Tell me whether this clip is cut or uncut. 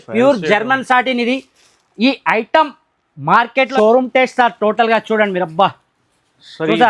cut